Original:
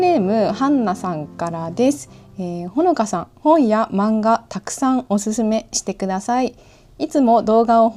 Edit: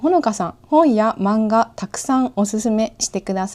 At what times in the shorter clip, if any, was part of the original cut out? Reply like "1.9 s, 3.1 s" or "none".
none